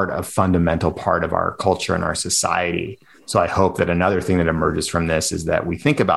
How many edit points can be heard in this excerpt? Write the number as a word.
zero